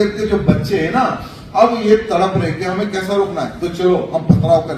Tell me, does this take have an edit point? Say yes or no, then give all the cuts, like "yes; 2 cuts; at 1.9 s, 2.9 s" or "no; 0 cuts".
no; 0 cuts